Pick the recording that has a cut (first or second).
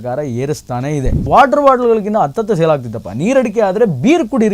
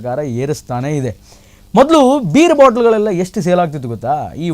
first